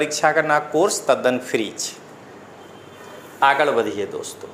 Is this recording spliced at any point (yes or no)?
no